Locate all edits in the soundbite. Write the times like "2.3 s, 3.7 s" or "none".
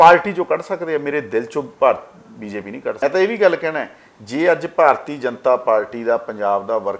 3.0 s